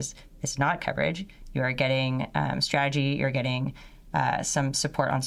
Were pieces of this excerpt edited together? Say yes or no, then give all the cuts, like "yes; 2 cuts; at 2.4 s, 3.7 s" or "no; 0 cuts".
no; 0 cuts